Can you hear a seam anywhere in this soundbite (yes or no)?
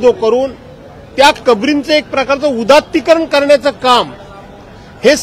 no